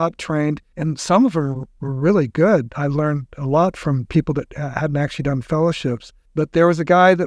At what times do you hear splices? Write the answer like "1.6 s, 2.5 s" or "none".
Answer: 6.1 s

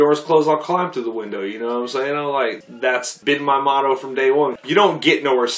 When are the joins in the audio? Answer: 2.6 s, 4.6 s

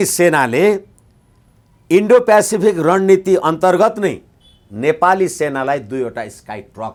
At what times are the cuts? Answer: none

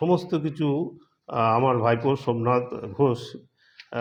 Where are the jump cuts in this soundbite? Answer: none

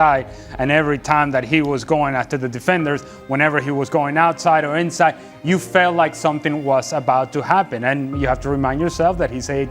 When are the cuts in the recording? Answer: 7.8 s

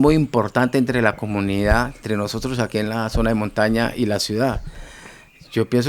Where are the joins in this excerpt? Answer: 2.0 s

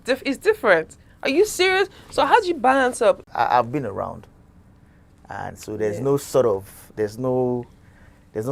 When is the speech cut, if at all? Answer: 3.3 s

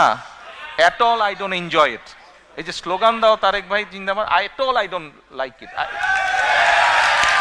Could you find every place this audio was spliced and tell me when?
none

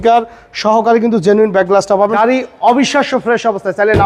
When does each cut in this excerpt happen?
2.1 s

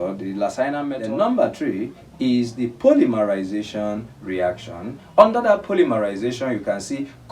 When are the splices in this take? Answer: 0.9 s

